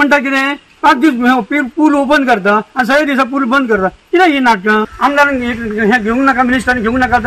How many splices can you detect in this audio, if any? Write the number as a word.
one